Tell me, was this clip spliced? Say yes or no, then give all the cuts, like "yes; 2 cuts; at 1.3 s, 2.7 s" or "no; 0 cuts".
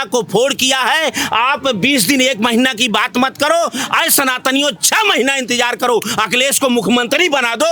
no; 0 cuts